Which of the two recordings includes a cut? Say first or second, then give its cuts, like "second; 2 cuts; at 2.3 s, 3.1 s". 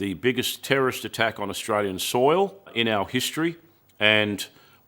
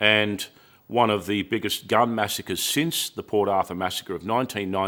first; 1 cut; at 2.7 s